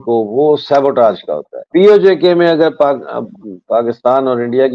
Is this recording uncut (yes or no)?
no